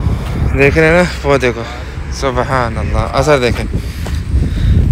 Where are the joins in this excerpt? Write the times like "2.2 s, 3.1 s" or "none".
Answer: none